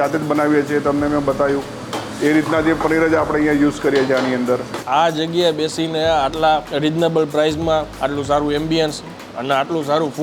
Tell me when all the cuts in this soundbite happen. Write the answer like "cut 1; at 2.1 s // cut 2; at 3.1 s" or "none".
cut 1; at 4.8 s // cut 2; at 6.7 s // cut 3; at 7.9 s